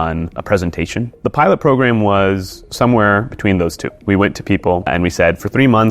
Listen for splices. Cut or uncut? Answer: cut